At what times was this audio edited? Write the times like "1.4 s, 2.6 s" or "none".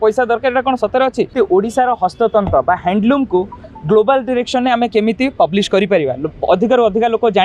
1.3 s